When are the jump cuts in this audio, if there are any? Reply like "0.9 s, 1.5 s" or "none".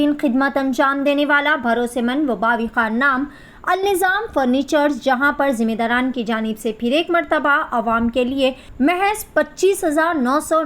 8.6 s